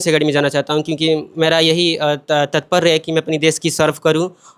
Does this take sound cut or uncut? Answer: uncut